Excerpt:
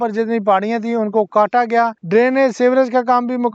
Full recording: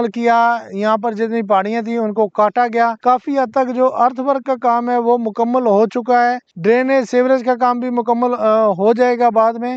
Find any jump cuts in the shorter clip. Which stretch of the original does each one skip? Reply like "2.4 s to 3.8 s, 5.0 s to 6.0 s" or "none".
3.0 s to 6.5 s

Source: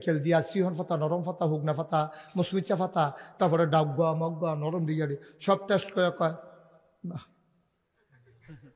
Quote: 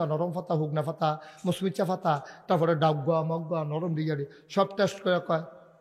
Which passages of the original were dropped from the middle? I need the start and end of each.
none

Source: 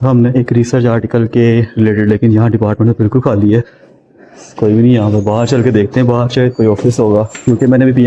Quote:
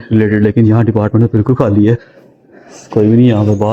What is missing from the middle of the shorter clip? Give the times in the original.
none

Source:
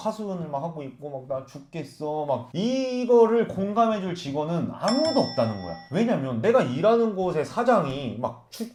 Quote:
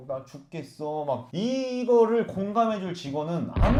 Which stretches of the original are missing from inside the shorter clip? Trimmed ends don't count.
none

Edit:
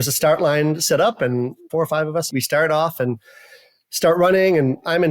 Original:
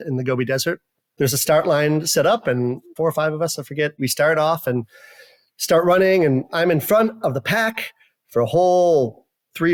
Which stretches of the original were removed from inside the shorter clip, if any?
3.5 s to 4.0 s

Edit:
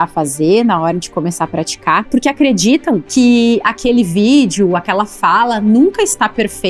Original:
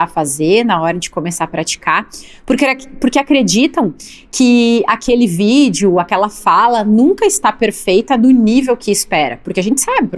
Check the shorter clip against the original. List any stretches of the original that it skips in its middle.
2.1 s to 3.0 s, 4.0 s to 4.3 s

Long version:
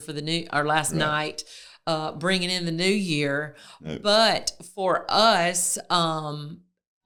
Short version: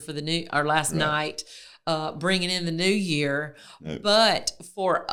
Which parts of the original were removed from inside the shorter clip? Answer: none

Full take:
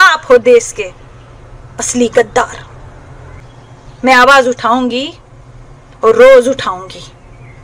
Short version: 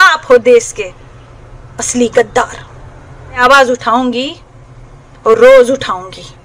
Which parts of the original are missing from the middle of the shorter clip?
3.4 s to 4.2 s

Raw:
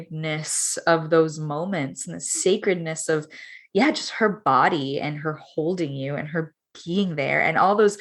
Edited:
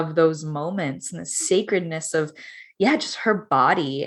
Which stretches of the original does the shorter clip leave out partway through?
none

